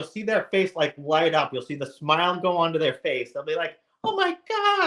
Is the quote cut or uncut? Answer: uncut